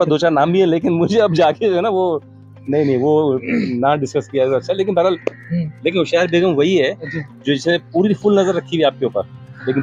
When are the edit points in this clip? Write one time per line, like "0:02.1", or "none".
0:05.7